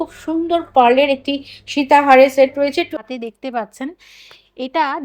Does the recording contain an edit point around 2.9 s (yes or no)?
yes